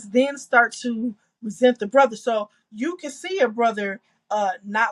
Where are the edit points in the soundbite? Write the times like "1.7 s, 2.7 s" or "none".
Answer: none